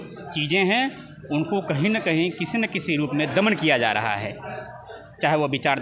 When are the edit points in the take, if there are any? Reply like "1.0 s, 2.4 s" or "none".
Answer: none